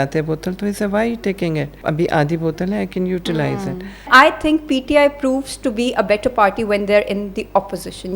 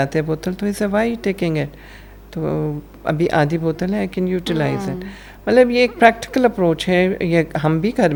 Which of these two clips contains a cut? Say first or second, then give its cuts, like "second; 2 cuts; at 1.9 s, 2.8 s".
first; 2 cuts; at 1.7 s, 4.1 s